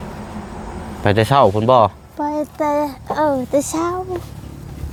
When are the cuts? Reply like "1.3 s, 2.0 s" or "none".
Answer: none

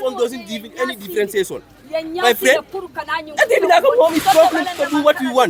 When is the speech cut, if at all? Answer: none

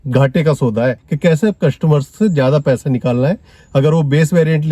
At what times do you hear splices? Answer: 1.1 s

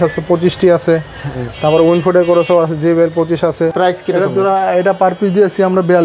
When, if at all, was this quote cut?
3.7 s

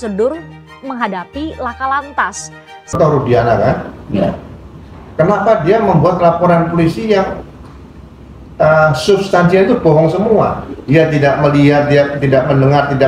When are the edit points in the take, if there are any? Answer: 2.9 s

